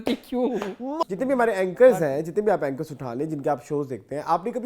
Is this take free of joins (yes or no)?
no